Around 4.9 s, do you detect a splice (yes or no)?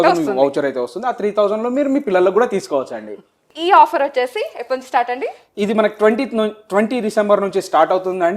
no